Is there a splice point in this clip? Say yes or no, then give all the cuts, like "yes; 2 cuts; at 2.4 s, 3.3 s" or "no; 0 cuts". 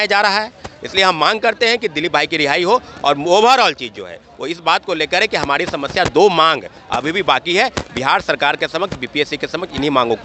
no; 0 cuts